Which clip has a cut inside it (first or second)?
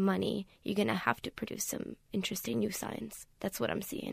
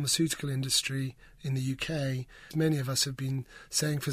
second